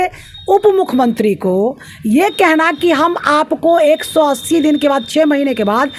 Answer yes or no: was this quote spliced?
no